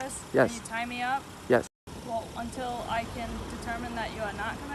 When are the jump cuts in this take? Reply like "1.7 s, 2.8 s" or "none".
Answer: 1.9 s